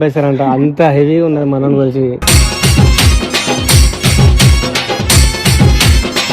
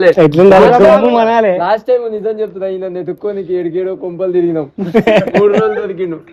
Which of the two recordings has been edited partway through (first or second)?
first